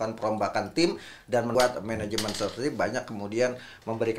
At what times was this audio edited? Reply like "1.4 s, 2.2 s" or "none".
1.5 s